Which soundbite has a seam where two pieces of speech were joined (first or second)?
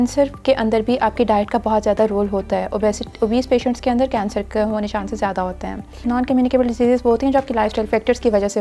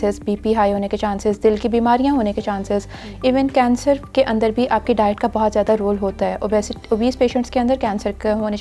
first